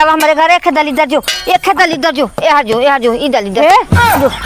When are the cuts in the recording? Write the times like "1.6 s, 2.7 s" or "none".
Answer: none